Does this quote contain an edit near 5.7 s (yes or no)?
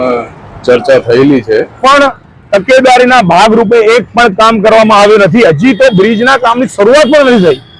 no